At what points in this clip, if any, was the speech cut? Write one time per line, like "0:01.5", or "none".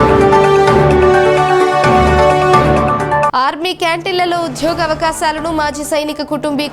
0:01.2